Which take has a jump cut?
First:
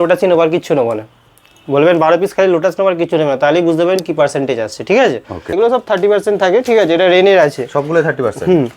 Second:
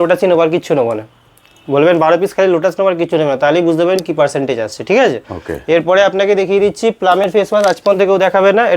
first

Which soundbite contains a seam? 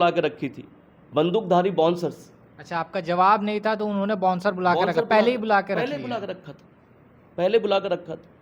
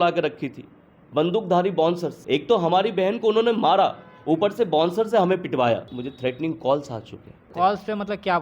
second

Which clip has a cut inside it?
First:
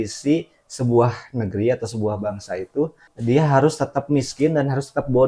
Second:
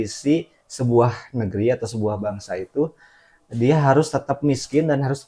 first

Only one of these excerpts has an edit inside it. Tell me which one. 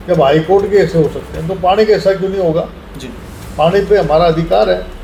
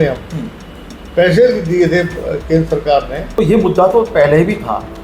second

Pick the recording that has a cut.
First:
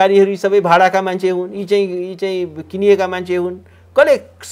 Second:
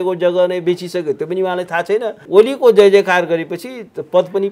second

